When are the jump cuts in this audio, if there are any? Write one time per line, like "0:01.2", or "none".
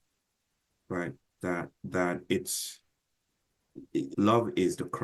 0:04.1